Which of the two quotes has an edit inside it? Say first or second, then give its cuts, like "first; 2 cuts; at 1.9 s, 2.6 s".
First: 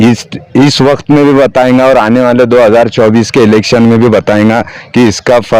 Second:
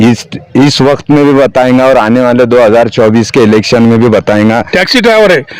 second; 1 cut; at 4.7 s